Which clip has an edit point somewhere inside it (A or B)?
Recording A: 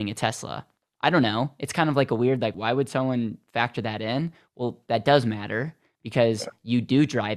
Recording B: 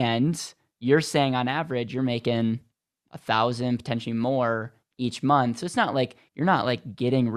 A